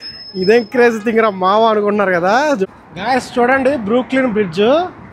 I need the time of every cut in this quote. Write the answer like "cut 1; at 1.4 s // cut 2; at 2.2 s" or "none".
cut 1; at 2.6 s